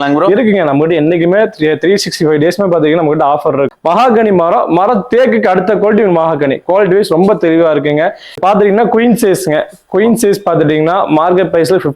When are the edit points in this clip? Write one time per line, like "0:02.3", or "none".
0:03.7
0:08.4